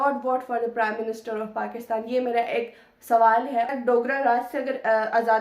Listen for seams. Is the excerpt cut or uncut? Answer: cut